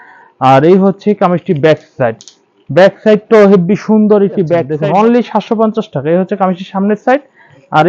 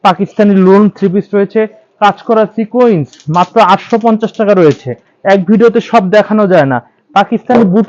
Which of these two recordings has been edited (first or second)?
first